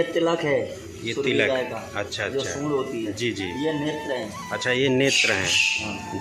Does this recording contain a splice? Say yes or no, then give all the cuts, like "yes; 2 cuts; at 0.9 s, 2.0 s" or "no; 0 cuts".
no; 0 cuts